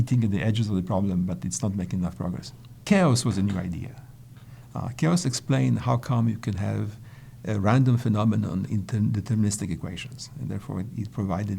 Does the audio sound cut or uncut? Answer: cut